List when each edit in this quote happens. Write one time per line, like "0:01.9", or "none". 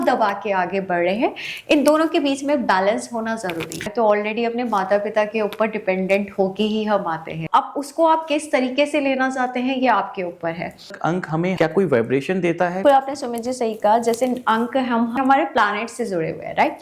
0:03.8
0:07.4
0:11.1
0:12.8
0:15.2